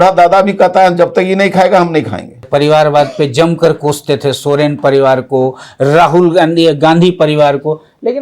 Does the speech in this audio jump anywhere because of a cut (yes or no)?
yes